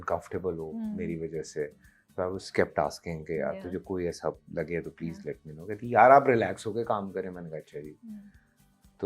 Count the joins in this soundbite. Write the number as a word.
zero